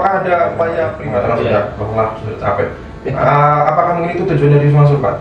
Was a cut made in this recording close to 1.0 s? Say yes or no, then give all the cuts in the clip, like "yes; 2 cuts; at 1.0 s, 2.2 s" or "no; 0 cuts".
yes; 1 cut; at 1.0 s